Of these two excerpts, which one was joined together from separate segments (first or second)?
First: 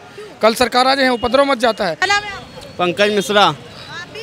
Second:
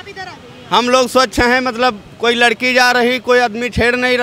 first